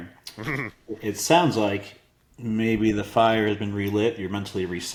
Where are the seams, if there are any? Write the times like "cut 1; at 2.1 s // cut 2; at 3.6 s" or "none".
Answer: none